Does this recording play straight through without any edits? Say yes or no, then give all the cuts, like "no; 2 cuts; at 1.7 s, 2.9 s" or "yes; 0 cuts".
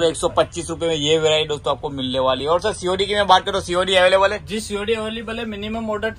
yes; 0 cuts